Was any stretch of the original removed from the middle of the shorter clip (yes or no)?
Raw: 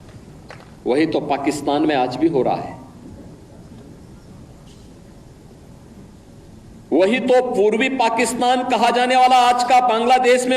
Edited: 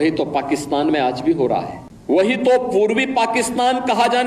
yes